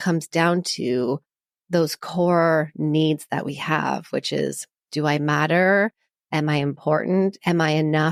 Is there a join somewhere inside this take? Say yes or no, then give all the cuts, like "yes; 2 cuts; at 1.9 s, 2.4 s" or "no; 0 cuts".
no; 0 cuts